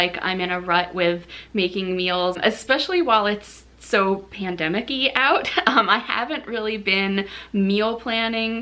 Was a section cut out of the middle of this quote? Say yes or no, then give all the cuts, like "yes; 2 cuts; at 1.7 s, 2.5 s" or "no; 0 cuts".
yes; 1 cut; at 2.4 s